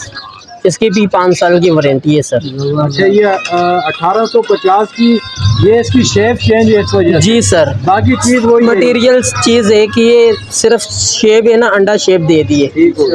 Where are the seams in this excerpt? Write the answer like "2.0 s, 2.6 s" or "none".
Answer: none